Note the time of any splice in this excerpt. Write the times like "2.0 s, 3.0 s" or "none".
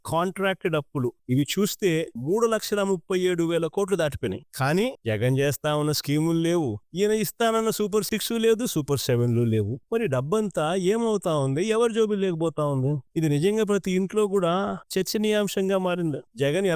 none